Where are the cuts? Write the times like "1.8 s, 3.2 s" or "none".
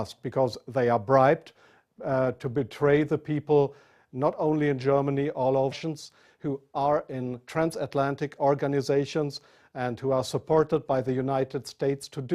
none